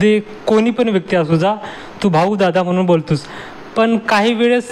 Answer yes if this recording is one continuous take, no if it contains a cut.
yes